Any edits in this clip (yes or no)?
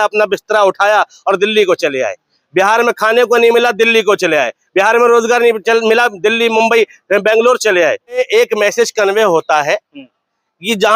yes